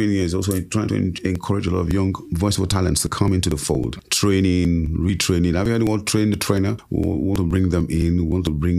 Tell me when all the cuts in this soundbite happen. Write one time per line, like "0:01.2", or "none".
0:02.2
0:04.0
0:06.8